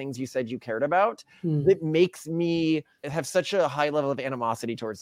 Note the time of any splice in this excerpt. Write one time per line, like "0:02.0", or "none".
0:03.1